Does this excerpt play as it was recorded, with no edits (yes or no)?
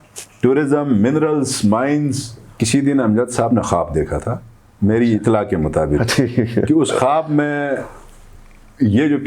no